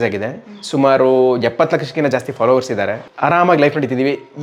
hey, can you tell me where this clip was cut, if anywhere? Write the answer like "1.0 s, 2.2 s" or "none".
3.0 s